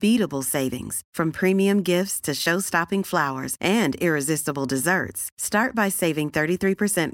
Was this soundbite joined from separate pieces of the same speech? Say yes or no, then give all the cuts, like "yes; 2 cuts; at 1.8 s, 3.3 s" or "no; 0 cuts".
no; 0 cuts